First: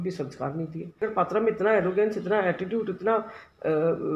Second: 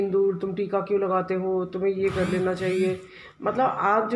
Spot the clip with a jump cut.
first; 1 cut; at 1.1 s

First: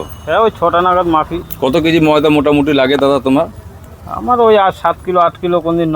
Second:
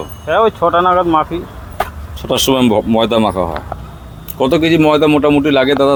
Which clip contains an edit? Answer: first; 1 cut; at 1.4 s

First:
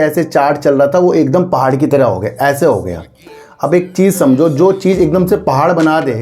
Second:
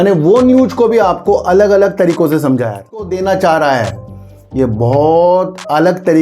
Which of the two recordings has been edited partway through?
second; 1 cut; at 3.1 s

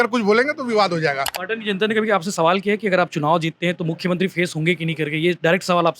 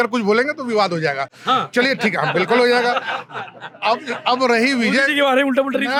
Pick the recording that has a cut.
first; 1 cut; at 1.3 s

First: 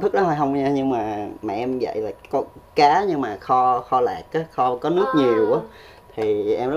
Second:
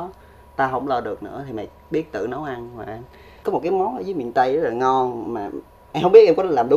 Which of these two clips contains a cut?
second; 1 cut; at 3.4 s

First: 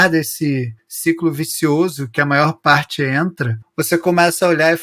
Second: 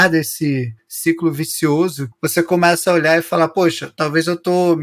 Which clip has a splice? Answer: second; 1 cut; at 2.1 s

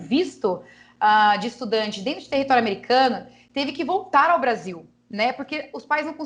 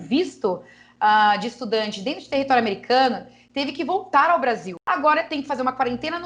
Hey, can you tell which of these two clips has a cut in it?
second; 1 cut; at 4.8 s

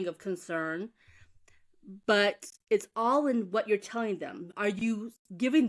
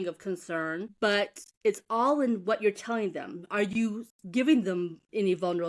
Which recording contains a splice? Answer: second; 1 cut; at 0.9 s

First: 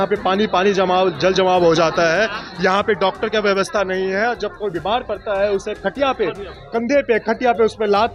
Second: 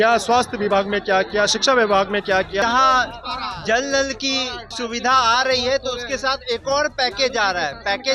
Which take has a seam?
second; 2 cuts; at 2.6 s, 4.6 s

